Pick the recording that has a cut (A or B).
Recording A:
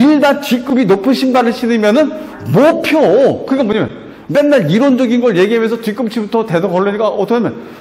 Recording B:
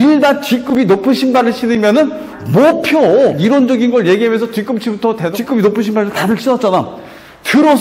B